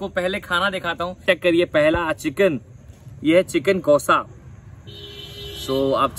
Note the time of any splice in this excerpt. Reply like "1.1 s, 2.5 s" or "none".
1.2 s